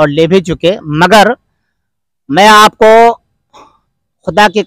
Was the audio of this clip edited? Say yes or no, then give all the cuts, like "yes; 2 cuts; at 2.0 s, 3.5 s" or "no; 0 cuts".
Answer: no; 0 cuts